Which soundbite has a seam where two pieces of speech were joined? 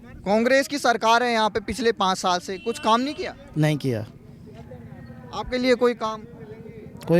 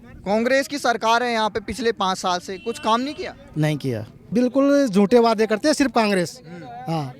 second; 1 cut; at 4.3 s

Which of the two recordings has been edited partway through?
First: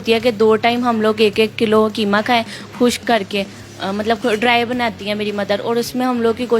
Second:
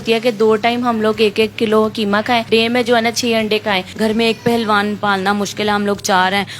second; 2 cuts; at 2.5 s, 3.9 s

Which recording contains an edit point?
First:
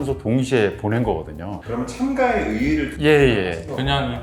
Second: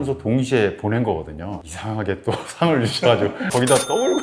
second; 1 cut; at 1.6 s

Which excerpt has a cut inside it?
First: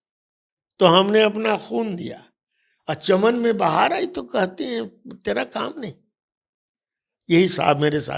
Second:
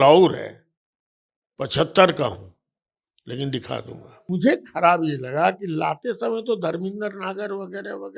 second; 1 cut; at 4.3 s

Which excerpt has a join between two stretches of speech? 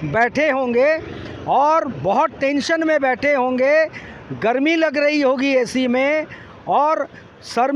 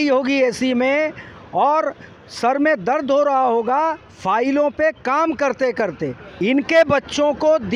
second; 1 cut; at 6.2 s

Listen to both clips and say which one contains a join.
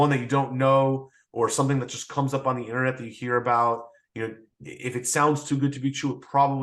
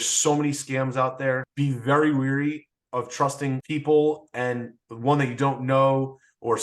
second; 2 cuts; at 1.5 s, 3.6 s

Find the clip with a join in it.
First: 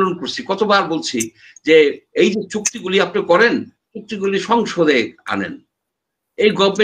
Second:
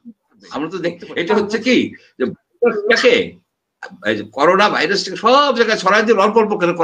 second; 1 cut; at 1.0 s

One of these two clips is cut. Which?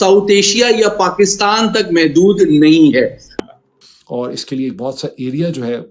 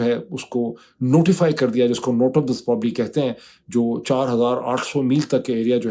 first; 1 cut; at 3.4 s

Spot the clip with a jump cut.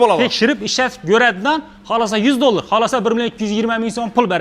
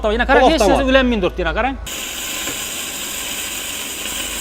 second; 1 cut; at 1.9 s

